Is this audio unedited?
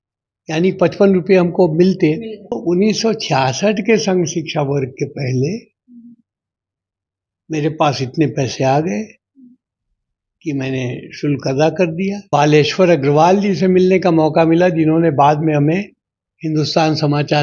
no; 2 cuts; at 2.6 s, 12.2 s

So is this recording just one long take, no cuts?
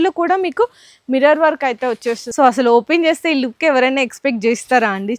no; 1 cut; at 2.2 s

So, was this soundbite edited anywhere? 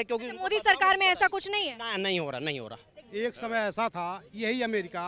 no; 0 cuts

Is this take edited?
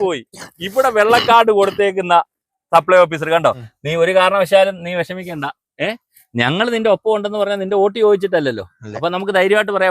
yes; 1 cut; at 3.7 s

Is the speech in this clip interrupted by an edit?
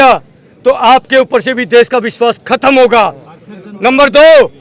no; 0 cuts

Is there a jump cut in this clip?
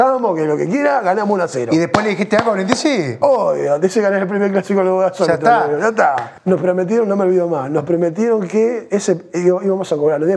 yes; 2 cuts; at 3.2 s, 6.3 s

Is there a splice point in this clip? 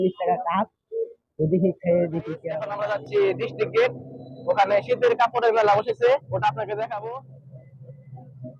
yes; 2 cuts; at 2.7 s, 7.0 s

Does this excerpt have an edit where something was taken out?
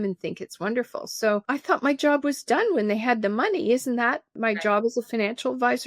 yes; 2 cuts; at 1.4 s, 4.3 s

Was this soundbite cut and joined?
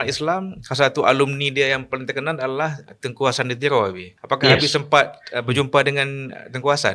yes; 1 cut; at 4.1 s

